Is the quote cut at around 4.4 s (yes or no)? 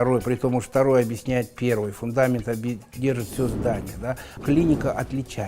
yes